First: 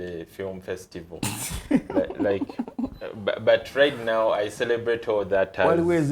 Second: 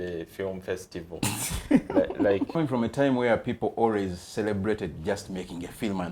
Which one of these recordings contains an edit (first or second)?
second